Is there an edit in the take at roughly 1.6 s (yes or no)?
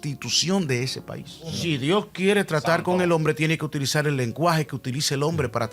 yes